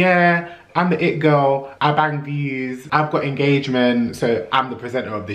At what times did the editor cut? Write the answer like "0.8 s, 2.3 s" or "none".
1.7 s, 2.8 s